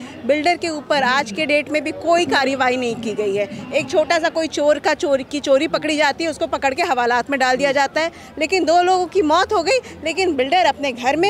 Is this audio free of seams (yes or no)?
yes